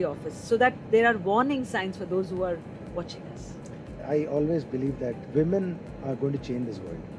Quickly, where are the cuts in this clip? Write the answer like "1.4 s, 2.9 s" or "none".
4.0 s, 5.2 s